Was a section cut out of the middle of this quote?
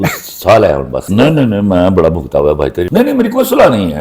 yes; 2 cuts; at 1.1 s, 2.9 s

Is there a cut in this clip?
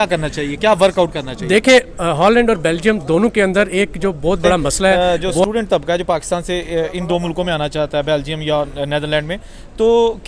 yes; 1 cut; at 4.9 s

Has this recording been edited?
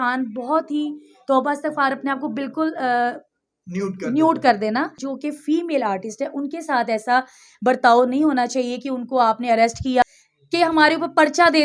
yes; 2 cuts; at 5.0 s, 10.0 s

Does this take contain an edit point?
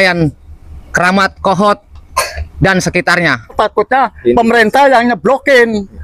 yes; 1 cut; at 3.5 s

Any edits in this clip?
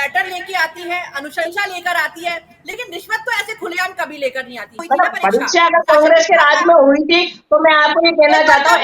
yes; 1 cut; at 4.8 s

